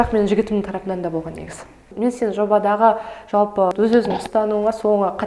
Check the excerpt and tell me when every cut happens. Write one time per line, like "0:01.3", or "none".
0:01.9
0:03.7